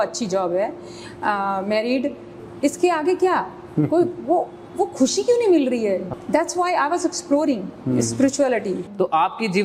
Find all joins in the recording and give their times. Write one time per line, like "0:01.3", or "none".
0:02.3
0:06.1
0:08.8